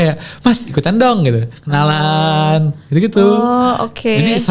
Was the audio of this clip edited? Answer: no; 0 cuts

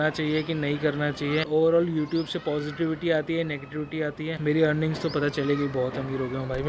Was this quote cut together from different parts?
yes; 2 cuts; at 1.5 s, 4.4 s

